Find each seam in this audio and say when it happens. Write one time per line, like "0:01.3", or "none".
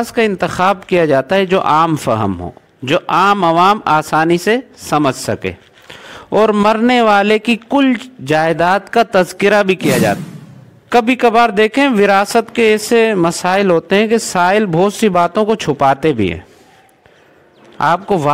0:10.2